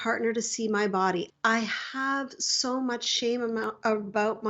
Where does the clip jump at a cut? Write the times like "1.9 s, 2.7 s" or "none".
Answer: 1.3 s